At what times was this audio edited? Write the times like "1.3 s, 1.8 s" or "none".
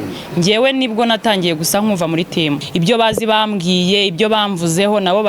2.6 s